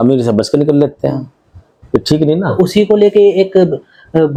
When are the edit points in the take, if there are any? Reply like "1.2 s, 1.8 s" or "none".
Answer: none